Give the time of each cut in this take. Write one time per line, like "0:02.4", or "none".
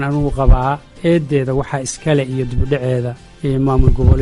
0:01.0
0:03.2